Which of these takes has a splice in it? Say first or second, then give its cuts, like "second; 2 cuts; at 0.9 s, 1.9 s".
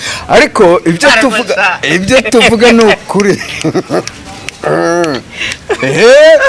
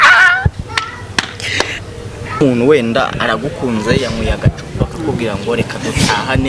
second; 1 cut; at 2.4 s